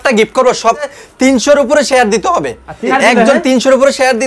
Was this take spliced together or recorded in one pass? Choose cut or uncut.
cut